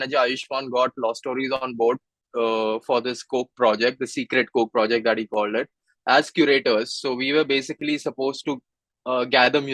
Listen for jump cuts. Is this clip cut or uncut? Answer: uncut